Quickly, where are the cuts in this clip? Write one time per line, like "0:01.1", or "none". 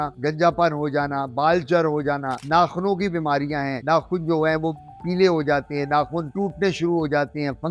none